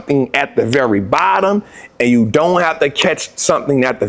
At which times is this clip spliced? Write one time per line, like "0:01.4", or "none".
none